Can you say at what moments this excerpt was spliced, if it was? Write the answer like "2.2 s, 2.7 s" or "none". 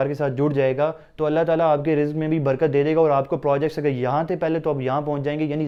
none